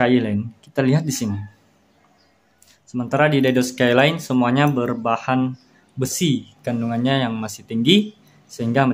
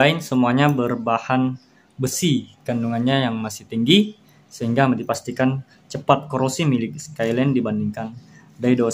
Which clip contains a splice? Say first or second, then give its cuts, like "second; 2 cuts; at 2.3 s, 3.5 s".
first; 1 cut; at 2.4 s